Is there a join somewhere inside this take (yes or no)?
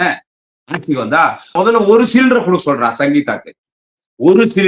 no